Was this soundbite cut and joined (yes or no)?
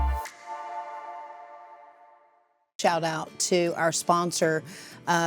yes